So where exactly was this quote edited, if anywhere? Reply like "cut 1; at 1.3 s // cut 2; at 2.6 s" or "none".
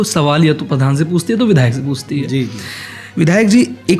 none